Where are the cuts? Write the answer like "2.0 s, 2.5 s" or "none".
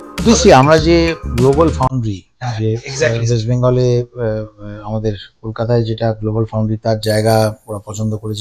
none